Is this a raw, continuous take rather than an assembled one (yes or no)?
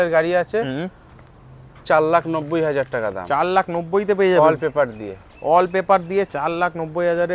yes